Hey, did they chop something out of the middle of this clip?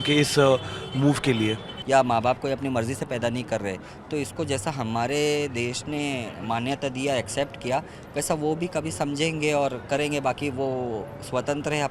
yes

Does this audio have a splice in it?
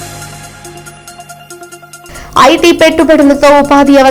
yes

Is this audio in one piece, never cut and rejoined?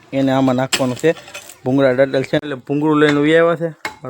no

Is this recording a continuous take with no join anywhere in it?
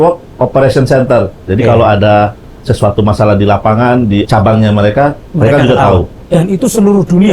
no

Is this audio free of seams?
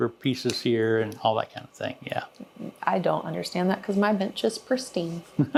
yes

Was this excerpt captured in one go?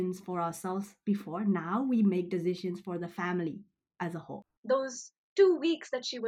no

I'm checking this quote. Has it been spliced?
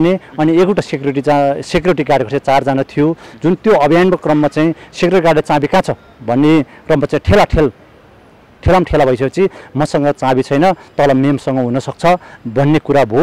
no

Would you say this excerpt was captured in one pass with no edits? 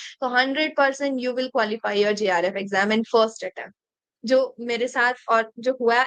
yes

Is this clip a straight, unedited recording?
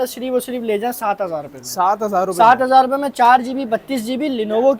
yes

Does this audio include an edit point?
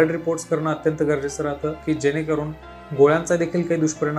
yes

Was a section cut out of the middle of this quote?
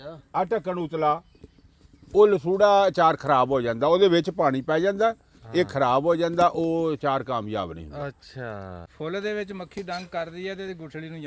yes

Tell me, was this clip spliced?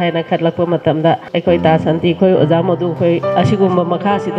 yes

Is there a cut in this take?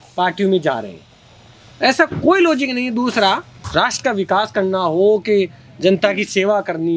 yes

